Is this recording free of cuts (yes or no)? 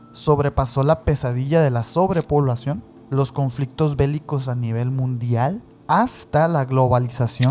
no